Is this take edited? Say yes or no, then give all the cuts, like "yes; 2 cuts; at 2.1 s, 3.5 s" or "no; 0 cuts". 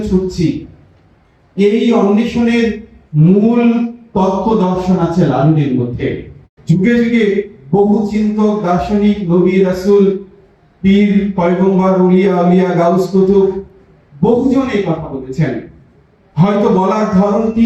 yes; 1 cut; at 6.5 s